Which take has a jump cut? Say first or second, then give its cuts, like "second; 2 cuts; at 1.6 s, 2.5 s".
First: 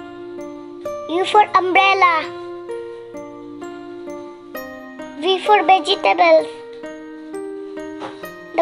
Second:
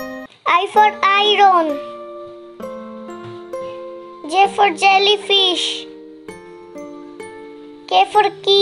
second; 4 cuts; at 2.0 s, 4.2 s, 5.6 s, 7.9 s